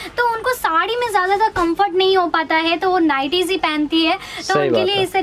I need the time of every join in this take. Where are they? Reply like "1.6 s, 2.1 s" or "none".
none

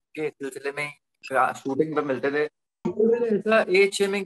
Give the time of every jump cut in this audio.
2.9 s

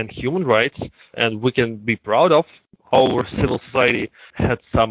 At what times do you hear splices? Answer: 2.6 s

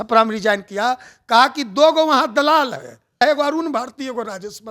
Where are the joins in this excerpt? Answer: 3.2 s

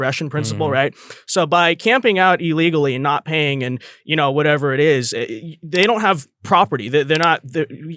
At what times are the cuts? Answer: none

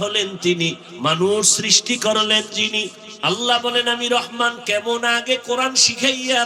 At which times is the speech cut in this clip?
3.0 s

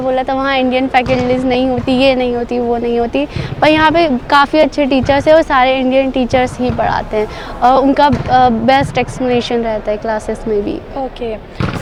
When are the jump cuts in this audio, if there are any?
none

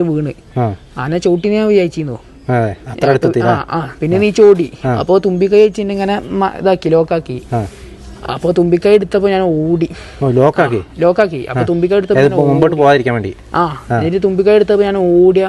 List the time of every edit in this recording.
none

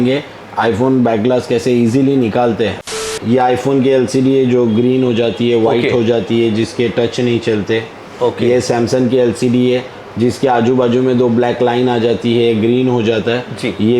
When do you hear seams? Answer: 2.9 s

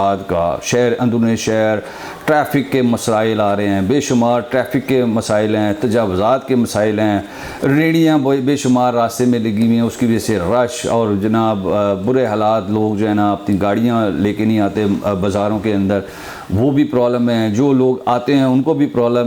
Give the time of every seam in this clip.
none

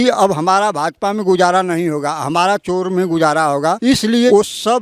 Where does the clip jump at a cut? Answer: 3.9 s

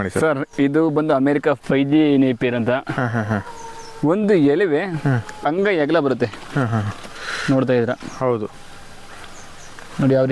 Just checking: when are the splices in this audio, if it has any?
none

